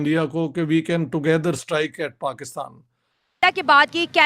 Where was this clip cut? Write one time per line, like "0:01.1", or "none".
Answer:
0:03.3

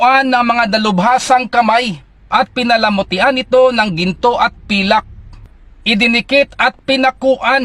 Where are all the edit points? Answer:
0:05.2

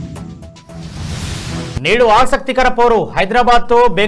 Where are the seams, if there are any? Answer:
0:01.7

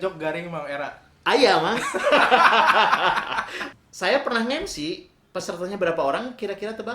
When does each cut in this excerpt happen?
0:03.6

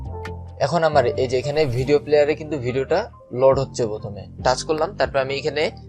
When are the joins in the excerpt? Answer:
0:04.2

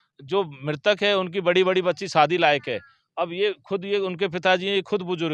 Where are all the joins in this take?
none

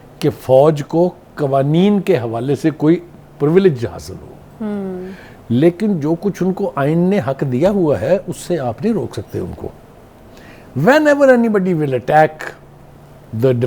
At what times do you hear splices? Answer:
none

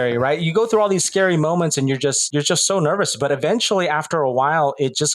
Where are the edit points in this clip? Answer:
0:02.2

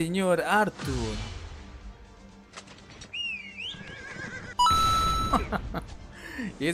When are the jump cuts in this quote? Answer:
none

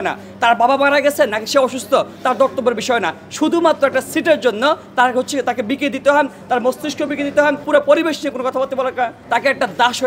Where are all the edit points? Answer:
0:07.6
0:09.2

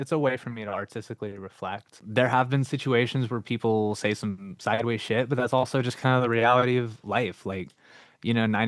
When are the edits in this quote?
0:01.9

